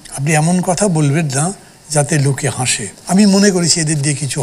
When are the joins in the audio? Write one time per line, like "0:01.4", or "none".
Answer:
0:02.9